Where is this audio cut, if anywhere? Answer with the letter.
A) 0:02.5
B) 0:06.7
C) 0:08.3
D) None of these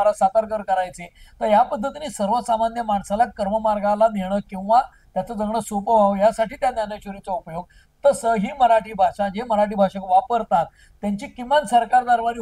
D